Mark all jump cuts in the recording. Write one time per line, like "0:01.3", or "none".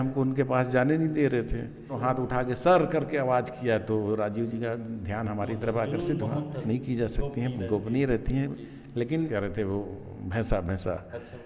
0:02.0
0:06.6
0:09.3